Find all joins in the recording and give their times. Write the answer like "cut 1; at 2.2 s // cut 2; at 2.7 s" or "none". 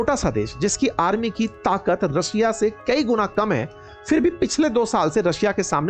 none